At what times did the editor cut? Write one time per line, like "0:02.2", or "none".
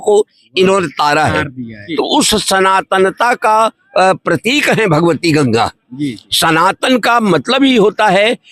0:01.8